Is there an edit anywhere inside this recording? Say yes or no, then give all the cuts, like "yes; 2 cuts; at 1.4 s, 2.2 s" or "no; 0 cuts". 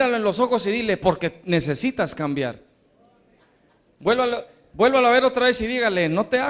no; 0 cuts